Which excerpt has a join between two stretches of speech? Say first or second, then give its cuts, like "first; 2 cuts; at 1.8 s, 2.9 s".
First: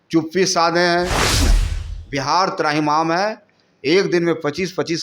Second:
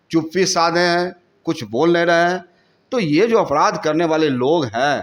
first; 1 cut; at 1.4 s